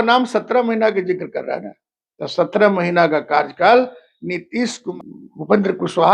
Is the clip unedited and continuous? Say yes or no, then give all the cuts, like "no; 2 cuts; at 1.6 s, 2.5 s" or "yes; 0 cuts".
no; 1 cut; at 4.9 s